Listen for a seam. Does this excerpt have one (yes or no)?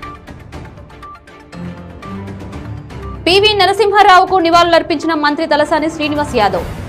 yes